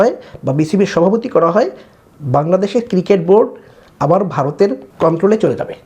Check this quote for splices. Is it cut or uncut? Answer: cut